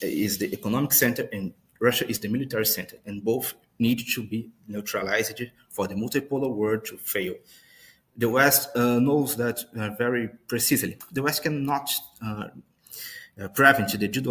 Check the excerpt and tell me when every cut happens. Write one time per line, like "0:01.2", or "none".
0:11.0